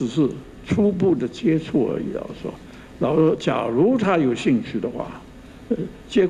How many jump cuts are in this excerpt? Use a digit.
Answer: 0